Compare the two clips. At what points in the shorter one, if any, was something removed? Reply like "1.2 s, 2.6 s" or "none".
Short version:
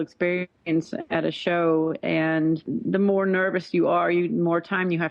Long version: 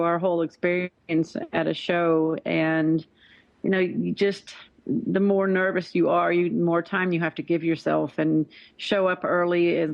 2.7 s